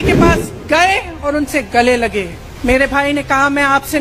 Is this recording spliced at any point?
yes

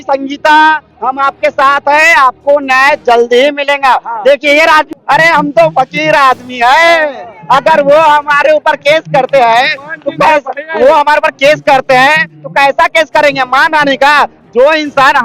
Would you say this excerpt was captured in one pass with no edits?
no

